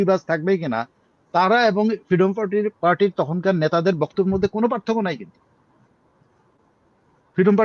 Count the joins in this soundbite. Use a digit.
0